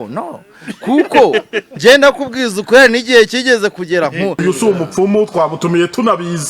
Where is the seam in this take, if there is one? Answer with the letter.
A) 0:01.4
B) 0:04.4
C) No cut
B